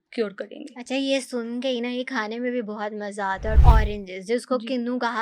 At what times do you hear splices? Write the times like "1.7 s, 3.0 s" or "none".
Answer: 3.6 s